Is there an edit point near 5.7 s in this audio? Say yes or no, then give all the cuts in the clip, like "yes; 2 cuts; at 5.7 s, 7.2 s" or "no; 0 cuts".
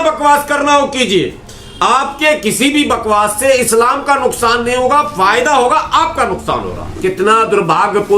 no; 1 cut; at 7.0 s